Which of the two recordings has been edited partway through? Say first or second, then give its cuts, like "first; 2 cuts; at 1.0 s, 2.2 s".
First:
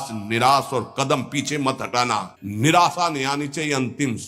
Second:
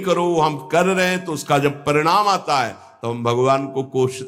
first; 1 cut; at 2.4 s